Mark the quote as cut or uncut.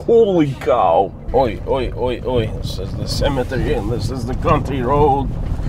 cut